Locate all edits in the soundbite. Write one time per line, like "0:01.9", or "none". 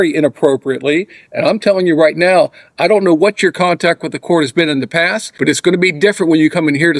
0:05.2